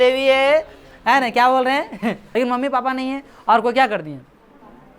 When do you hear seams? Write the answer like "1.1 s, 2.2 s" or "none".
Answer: 2.2 s